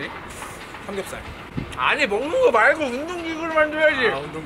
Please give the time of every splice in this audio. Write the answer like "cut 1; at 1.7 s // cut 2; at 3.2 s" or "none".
none